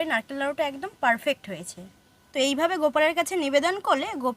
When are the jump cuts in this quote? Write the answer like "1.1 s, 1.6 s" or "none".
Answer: 2.2 s